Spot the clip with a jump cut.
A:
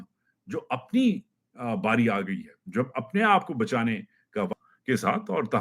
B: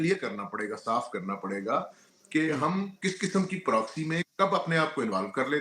A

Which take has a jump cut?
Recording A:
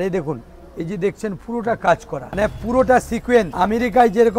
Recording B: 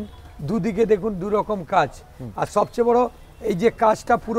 A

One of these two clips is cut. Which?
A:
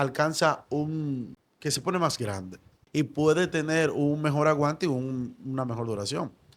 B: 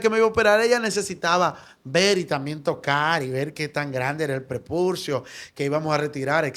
A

